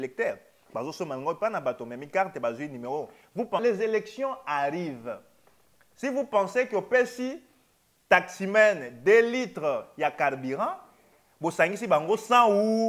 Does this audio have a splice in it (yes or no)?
yes